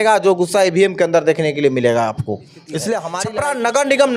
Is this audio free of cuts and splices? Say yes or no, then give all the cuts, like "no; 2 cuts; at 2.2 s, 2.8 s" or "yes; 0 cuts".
no; 1 cut; at 3.2 s